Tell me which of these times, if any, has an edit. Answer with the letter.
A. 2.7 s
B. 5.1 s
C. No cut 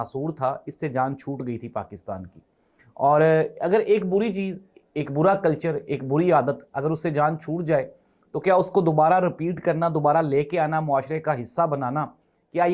C